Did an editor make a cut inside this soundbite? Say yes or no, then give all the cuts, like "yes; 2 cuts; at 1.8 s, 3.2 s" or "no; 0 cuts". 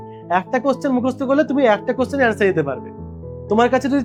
no; 0 cuts